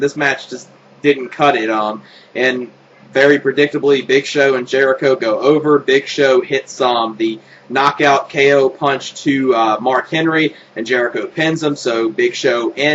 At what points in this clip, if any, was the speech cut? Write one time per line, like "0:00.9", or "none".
none